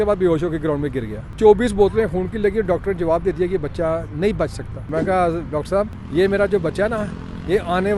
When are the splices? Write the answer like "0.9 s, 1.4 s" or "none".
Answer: 1.4 s, 4.9 s, 6.0 s